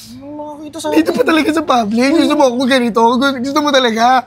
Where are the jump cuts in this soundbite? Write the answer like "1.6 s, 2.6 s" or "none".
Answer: none